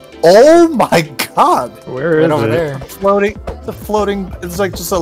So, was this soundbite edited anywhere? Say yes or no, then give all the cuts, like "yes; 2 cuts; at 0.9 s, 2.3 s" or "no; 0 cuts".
yes; 1 cut; at 1.8 s